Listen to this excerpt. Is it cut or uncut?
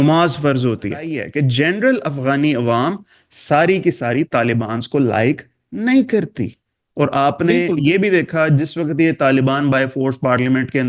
cut